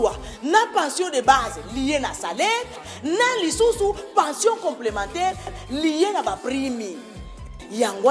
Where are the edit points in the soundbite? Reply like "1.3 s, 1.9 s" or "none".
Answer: none

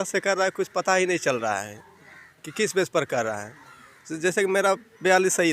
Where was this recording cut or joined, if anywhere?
none

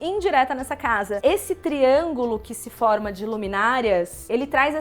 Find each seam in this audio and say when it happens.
1.2 s

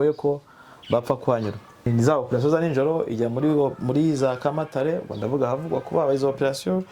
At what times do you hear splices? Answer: 1.9 s

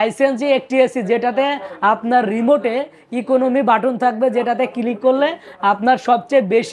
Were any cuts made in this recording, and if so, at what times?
none

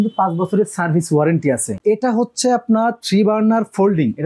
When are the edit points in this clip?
1.7 s

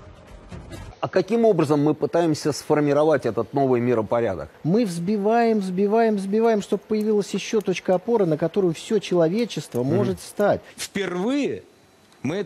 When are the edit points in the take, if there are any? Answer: 3.9 s, 10.7 s

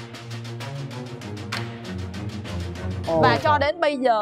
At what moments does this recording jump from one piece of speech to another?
none

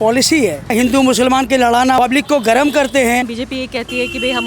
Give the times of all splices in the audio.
0.7 s, 2.0 s, 3.4 s

